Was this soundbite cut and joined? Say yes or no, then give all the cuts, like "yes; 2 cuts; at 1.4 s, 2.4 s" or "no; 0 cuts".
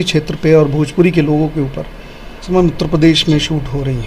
yes; 1 cut; at 2.5 s